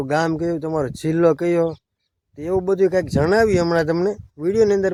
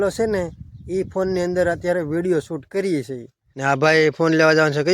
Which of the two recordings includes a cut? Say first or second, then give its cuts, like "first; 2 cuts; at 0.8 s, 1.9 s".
second; 1 cut; at 3.5 s